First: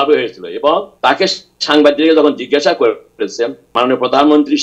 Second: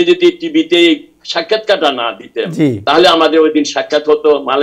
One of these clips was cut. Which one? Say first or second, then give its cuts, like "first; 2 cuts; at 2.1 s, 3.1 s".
first; 2 cuts; at 0.9 s, 3.7 s